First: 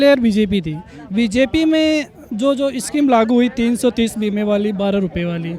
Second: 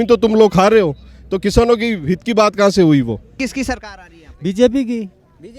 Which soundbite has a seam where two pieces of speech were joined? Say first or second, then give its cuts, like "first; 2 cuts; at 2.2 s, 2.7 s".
second; 1 cut; at 3.5 s